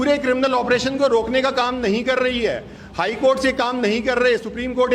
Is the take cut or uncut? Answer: uncut